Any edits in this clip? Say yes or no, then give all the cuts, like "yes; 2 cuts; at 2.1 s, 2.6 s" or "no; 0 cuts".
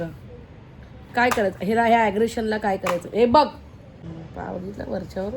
yes; 1 cut; at 3.9 s